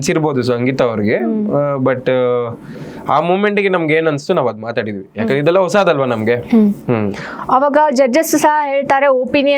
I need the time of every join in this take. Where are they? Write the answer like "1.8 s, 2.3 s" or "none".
none